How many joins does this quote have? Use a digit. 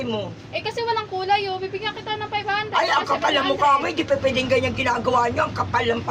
0